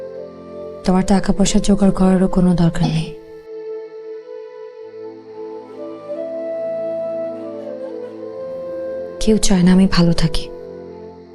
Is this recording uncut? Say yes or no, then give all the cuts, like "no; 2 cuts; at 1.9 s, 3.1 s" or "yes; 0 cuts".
yes; 0 cuts